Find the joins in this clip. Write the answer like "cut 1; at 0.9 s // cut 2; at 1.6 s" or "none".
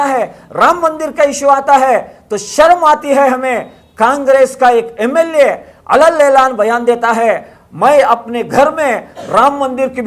none